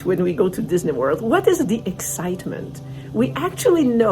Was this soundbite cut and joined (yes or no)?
no